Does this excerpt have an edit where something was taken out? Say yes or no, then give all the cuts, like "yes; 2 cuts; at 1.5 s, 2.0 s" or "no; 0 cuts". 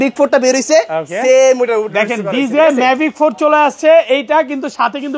no; 0 cuts